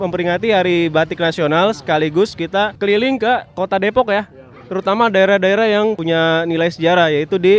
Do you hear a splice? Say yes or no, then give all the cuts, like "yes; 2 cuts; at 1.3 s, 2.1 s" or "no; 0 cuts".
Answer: yes; 2 cuts; at 2.7 s, 6.0 s